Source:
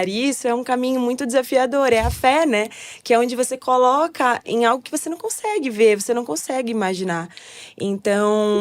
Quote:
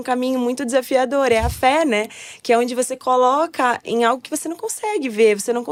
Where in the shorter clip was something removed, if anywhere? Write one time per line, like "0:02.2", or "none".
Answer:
none